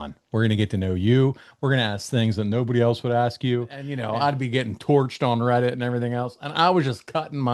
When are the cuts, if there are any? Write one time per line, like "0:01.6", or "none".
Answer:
0:04.0